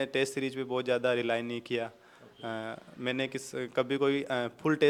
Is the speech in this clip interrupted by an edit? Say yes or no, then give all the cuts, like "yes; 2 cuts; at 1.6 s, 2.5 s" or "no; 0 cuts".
no; 0 cuts